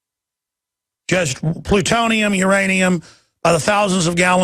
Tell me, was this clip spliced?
yes; 1 cut; at 2.2 s

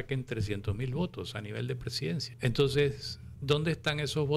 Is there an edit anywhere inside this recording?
yes; 1 cut; at 2.3 s

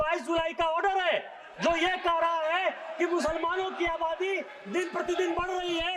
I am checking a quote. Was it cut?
no; 0 cuts

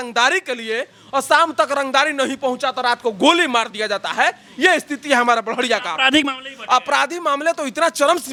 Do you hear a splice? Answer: no; 0 cuts

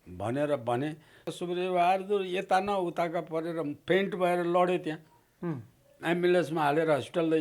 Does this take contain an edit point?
yes; 1 cut; at 1.3 s

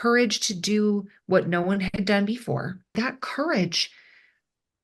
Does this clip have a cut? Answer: yes; 1 cut; at 2.9 s

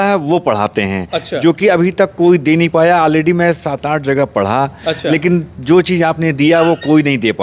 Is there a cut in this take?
no; 0 cuts

